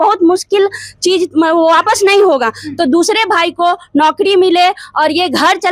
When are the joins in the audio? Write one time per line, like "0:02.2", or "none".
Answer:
none